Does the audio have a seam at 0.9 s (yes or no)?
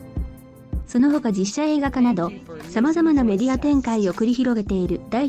yes